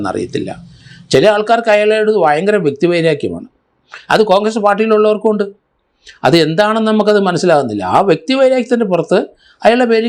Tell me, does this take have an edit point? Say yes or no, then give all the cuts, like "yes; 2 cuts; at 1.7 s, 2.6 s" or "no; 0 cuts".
no; 0 cuts